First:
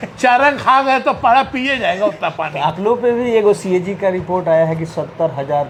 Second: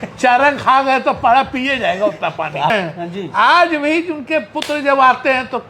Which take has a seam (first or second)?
second